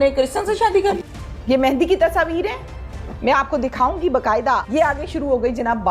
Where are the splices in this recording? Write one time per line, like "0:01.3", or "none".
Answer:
0:01.0
0:04.7

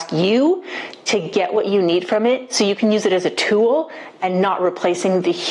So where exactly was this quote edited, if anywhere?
none

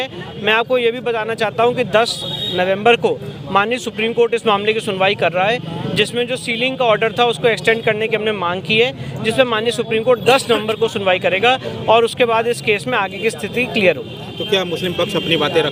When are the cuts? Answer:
none

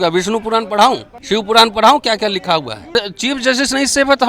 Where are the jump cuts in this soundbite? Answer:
0:01.1
0:02.9

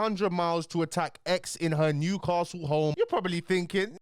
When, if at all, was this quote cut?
0:02.9

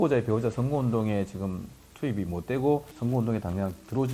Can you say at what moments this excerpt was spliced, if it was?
0:02.9

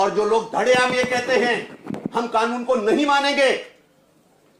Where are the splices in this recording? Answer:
none

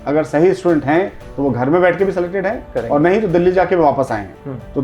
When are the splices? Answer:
none

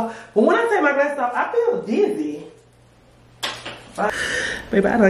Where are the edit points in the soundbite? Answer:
0:04.1

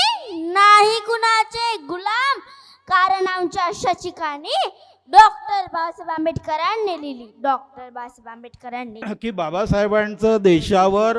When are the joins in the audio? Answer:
0:09.0

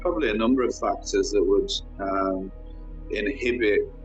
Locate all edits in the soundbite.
none

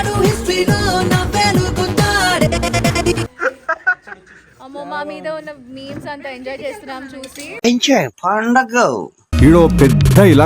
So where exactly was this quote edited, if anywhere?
0:03.3
0:09.2

